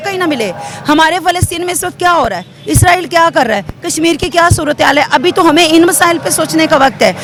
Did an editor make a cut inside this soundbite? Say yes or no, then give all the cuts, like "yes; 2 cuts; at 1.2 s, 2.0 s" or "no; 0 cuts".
no; 0 cuts